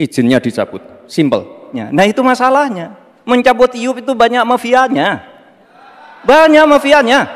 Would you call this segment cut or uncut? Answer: cut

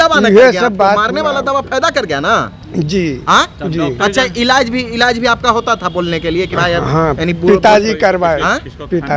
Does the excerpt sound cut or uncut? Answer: uncut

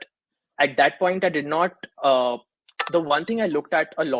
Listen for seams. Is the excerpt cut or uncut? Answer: cut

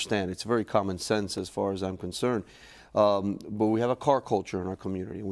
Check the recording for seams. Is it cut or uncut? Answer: cut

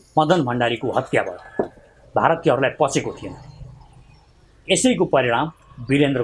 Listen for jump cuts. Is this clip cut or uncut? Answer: cut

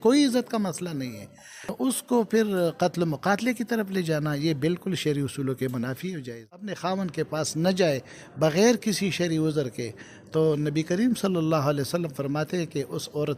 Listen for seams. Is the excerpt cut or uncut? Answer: cut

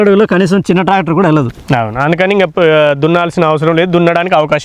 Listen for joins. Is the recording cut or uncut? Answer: uncut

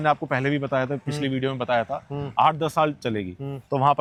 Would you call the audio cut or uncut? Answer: uncut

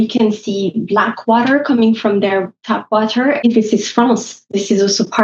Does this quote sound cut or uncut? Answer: cut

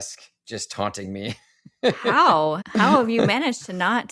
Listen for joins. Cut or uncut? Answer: cut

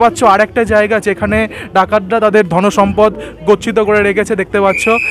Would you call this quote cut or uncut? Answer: uncut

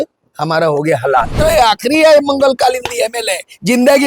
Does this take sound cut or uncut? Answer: cut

